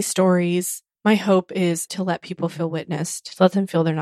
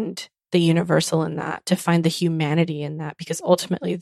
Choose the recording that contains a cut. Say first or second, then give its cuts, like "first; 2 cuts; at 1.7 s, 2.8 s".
first; 1 cut; at 1.9 s